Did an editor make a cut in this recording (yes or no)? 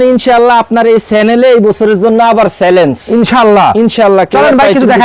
no